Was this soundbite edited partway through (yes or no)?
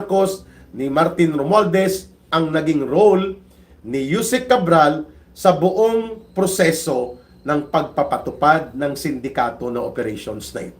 yes